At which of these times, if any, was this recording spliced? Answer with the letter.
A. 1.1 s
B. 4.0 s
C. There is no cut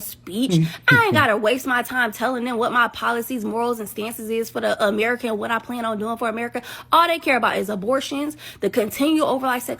B